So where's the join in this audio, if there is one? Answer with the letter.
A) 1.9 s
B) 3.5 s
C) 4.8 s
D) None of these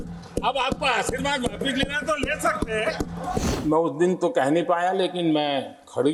B